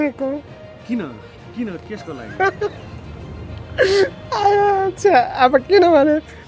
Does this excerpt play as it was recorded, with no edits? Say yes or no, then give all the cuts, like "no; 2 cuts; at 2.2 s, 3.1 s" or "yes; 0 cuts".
yes; 0 cuts